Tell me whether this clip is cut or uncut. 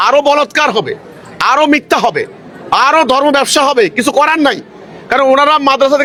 uncut